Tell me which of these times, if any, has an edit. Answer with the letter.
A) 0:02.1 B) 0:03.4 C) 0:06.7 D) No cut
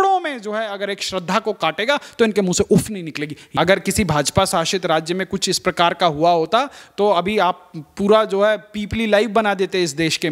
B